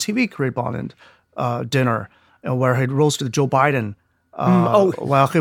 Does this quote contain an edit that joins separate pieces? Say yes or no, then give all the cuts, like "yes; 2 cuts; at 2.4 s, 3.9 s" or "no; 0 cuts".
no; 0 cuts